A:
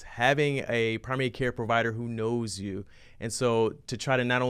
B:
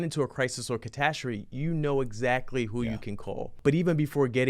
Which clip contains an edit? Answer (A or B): B